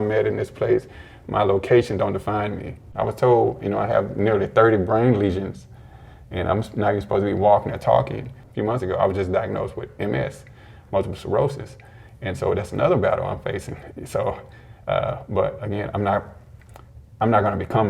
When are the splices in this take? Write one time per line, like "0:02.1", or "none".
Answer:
0:02.8
0:08.4

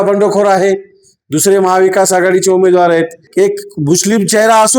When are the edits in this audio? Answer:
0:03.2

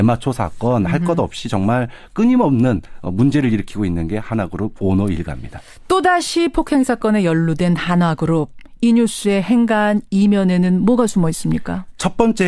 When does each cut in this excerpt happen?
0:02.2

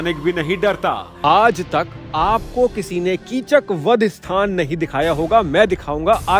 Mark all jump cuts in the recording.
0:01.1

